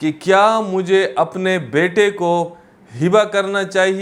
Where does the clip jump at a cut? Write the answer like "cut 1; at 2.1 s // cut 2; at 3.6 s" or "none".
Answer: none